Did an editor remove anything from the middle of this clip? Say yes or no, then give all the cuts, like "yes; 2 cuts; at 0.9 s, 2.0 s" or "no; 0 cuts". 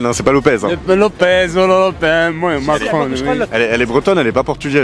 no; 0 cuts